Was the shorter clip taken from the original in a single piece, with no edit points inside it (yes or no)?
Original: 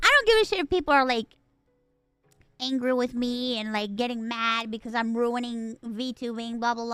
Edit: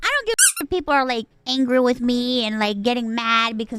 no